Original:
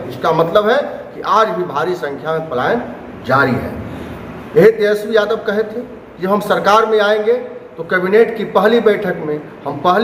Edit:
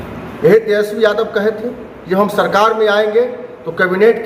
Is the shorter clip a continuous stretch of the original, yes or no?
yes